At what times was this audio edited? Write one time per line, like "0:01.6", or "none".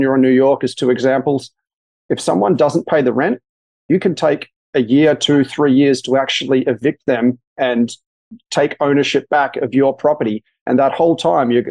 none